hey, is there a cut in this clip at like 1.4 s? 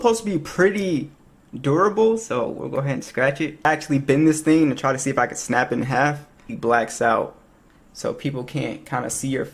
no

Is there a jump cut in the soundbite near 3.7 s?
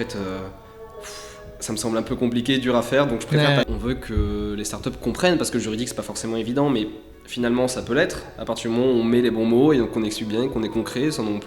yes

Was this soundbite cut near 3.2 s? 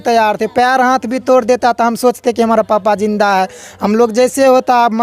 no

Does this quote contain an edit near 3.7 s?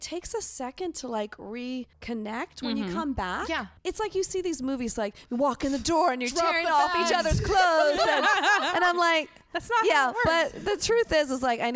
yes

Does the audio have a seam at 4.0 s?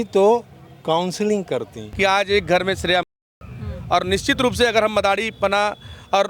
no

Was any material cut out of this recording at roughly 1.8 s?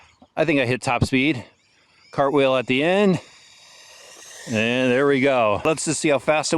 no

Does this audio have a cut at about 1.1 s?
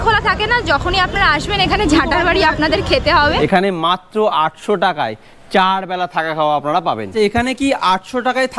no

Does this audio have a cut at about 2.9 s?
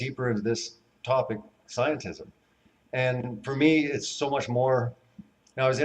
yes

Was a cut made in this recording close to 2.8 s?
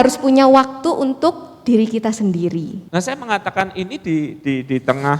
yes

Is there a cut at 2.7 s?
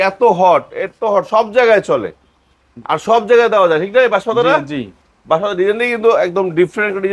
no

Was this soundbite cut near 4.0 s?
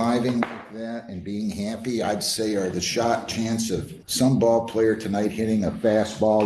yes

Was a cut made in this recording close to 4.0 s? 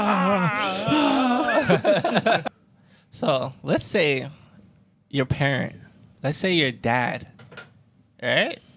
no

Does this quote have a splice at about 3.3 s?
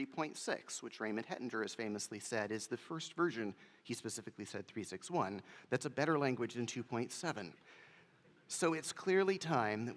no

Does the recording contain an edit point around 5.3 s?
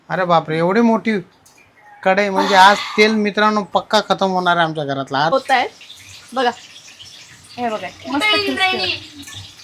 yes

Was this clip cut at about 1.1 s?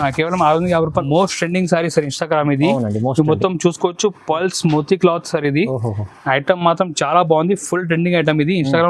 yes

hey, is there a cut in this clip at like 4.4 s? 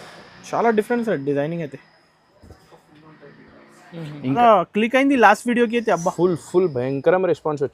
yes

